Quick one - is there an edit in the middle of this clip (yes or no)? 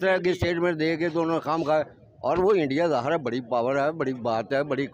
no